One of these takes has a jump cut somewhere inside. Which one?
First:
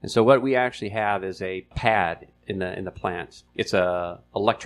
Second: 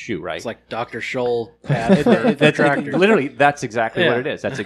first; 2 cuts; at 1.7 s, 3.3 s

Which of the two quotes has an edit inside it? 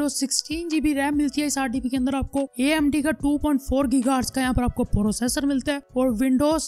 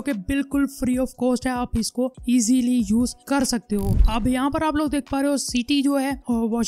second; 1 cut; at 4.0 s

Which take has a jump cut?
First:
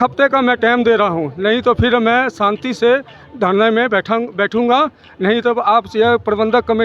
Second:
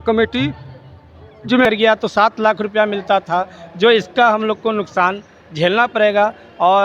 second; 1 cut; at 1.6 s

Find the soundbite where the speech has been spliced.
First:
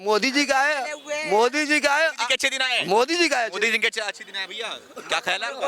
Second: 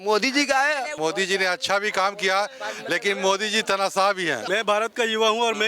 second; 2 cuts; at 0.9 s, 4.4 s

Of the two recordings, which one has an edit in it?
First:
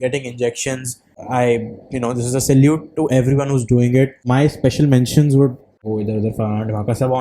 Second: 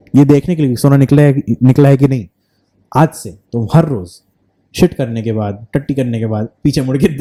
first; 3 cuts; at 1.1 s, 4.2 s, 5.8 s

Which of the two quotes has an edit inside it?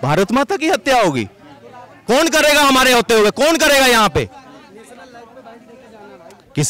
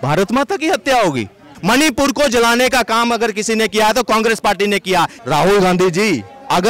second; 2 cuts; at 1.5 s, 5.2 s

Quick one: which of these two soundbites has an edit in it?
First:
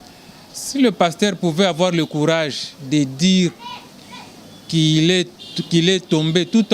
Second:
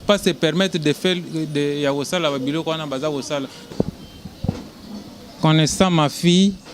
second; 1 cut; at 3.7 s

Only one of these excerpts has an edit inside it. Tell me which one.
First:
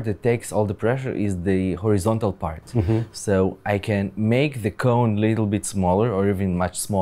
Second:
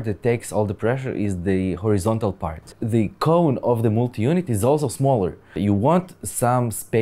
second; 2 cuts; at 2.7 s, 5.6 s

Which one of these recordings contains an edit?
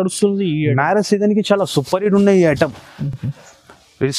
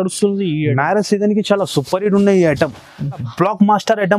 second; 1 cut; at 3.3 s

